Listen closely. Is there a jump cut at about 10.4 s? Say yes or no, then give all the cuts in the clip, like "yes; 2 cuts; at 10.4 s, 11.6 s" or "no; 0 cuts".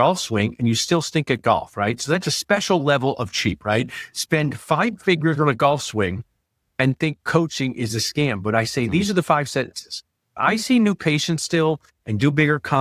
yes; 1 cut; at 10.4 s